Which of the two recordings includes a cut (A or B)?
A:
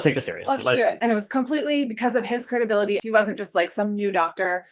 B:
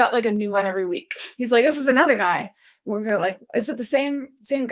A